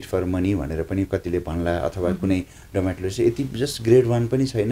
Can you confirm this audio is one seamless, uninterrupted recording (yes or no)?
yes